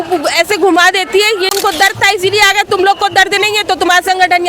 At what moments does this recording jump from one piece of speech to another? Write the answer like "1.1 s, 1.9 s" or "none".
1.5 s